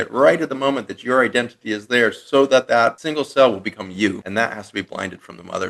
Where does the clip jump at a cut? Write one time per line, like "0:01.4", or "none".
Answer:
0:03.0
0:04.2